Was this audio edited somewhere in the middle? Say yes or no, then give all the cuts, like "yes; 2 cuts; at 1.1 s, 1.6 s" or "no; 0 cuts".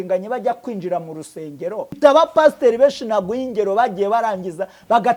yes; 1 cut; at 2.0 s